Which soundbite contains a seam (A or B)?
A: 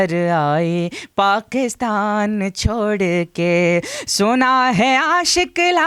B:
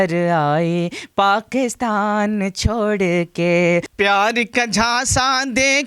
B